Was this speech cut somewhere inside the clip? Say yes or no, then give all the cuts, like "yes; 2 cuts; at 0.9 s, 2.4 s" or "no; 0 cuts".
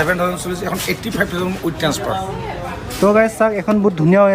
no; 0 cuts